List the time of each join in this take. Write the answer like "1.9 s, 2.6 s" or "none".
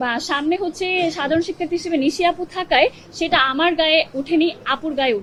none